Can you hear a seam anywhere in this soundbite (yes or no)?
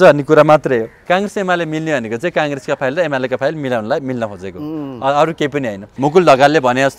yes